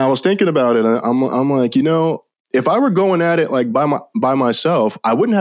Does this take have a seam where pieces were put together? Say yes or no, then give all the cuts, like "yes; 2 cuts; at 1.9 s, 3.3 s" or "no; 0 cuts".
no; 0 cuts